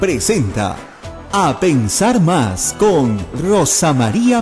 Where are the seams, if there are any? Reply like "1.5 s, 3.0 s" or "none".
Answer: none